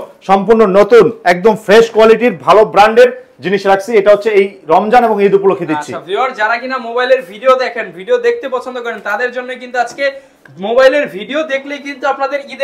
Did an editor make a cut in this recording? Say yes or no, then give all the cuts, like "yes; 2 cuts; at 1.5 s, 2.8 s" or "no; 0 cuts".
no; 0 cuts